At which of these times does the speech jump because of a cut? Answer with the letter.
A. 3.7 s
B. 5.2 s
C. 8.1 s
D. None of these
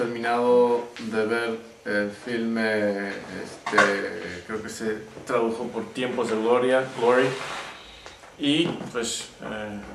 D